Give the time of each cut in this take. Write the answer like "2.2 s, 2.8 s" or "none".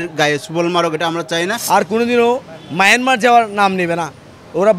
1.6 s